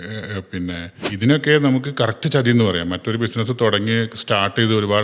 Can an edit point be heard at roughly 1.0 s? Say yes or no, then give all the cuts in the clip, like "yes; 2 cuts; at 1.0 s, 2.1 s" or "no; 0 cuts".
yes; 1 cut; at 1.0 s